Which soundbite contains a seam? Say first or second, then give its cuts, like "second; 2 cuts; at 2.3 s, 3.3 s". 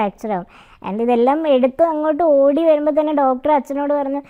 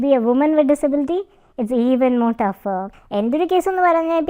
second; 1 cut; at 2.9 s